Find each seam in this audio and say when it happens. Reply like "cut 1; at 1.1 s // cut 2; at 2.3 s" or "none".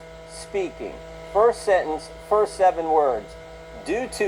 none